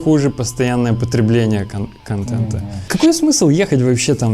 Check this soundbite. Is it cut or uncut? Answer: cut